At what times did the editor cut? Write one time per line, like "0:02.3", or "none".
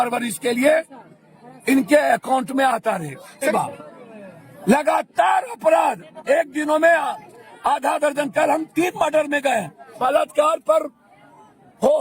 0:03.5
0:09.8